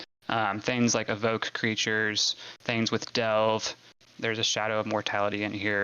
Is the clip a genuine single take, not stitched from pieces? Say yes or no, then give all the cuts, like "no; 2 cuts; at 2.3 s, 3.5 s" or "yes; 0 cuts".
no; 1 cut; at 4.0 s